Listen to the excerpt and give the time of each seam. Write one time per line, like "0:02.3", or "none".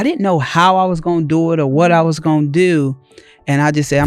none